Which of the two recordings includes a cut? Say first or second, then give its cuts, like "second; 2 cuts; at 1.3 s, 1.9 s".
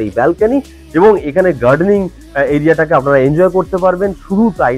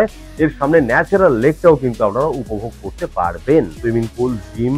second; 1 cut; at 3.7 s